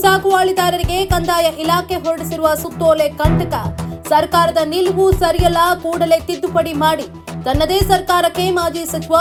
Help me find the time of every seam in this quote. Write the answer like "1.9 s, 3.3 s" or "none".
none